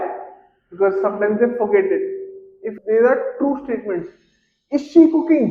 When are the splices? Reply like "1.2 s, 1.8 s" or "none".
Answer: 2.6 s